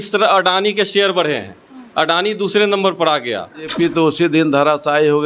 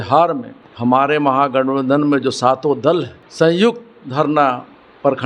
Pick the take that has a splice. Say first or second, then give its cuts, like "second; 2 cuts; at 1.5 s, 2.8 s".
first; 1 cut; at 3.6 s